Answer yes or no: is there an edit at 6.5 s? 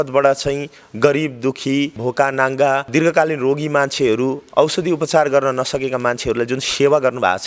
no